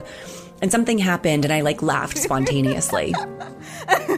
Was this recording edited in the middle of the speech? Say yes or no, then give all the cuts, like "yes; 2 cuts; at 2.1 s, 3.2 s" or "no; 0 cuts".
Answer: yes; 1 cut; at 3.1 s